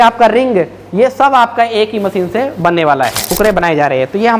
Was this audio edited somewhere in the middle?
yes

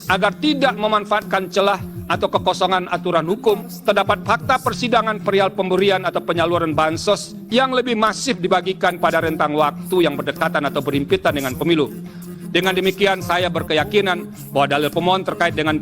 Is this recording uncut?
no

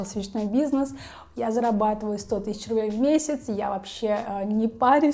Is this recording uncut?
yes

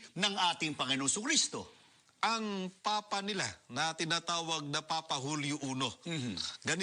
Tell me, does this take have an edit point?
yes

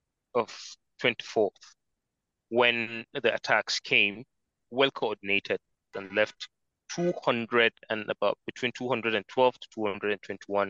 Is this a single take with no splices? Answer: no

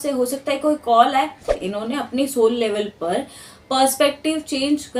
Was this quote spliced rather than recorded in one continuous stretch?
yes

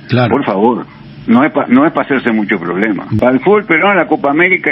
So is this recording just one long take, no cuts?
no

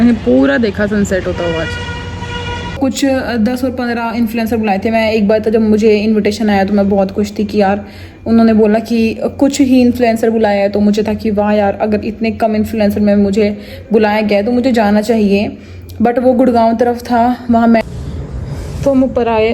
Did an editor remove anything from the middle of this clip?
yes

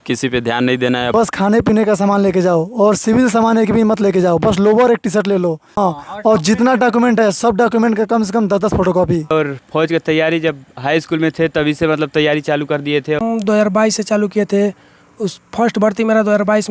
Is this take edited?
yes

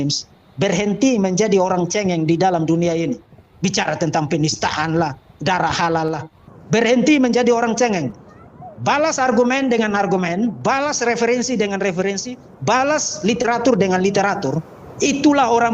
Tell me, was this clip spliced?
yes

